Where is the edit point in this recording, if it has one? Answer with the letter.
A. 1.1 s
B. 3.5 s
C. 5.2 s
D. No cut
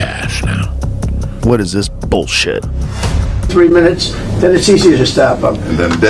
B